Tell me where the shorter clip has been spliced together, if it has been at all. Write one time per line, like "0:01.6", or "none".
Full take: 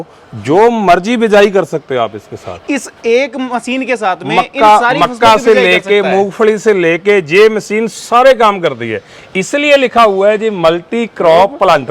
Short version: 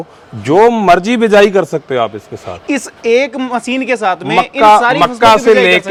none